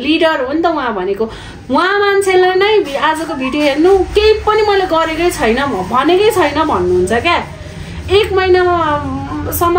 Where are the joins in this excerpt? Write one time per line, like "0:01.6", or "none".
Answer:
none